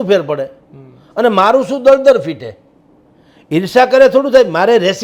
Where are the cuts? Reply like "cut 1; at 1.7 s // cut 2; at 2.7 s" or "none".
none